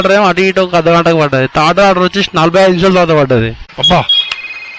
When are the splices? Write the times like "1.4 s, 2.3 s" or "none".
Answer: 3.7 s